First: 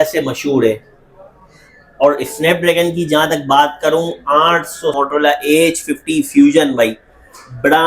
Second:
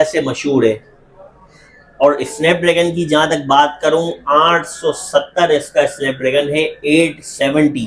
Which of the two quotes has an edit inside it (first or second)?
first